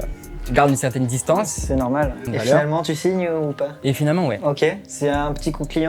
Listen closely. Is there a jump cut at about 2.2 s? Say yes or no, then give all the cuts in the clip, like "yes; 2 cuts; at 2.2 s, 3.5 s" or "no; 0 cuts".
yes; 1 cut; at 2.2 s